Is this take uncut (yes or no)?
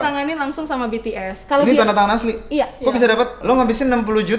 no